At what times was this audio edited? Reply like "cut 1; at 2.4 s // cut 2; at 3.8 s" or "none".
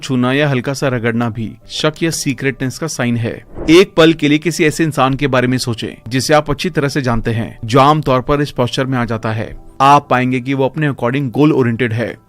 cut 1; at 3.5 s